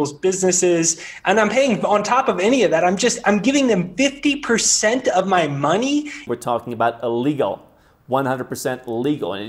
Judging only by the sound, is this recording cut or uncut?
cut